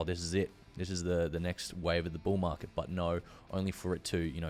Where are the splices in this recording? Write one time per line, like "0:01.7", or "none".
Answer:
none